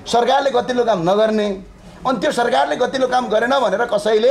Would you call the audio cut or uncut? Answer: uncut